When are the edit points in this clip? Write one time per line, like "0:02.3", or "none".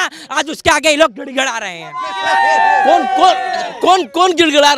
none